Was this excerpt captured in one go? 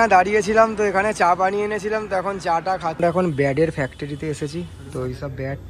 no; 1 cut; at 3.0 s

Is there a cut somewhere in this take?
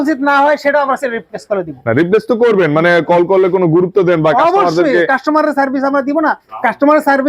no; 0 cuts

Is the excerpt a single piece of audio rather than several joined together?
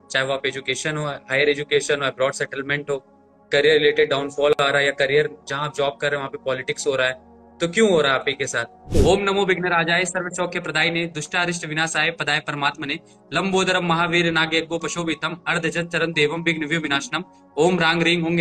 no; 1 cut; at 8.9 s

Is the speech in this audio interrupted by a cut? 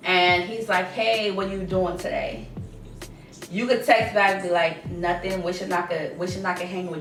no; 0 cuts

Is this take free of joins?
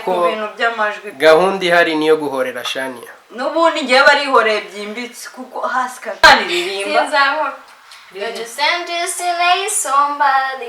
no; 1 cut; at 6.2 s

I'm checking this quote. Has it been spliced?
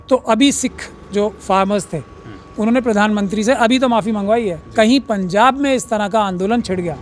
no; 0 cuts

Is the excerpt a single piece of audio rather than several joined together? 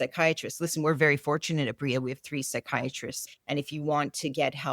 no; 1 cut; at 3.2 s

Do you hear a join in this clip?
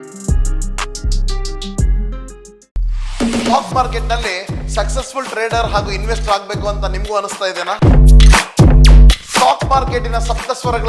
no; 0 cuts

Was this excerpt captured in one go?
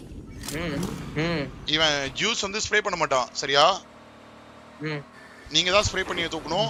yes; 0 cuts

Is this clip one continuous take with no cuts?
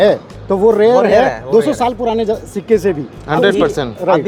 yes; 0 cuts

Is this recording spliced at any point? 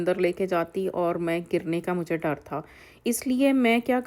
no; 0 cuts

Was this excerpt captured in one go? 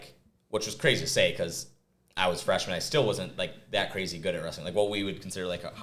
yes; 0 cuts

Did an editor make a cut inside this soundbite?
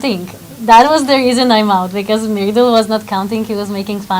no; 0 cuts

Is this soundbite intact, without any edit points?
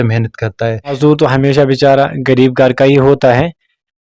no; 1 cut; at 1.0 s

